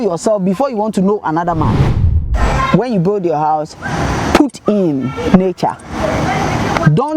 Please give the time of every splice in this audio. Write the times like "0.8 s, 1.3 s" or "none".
2.1 s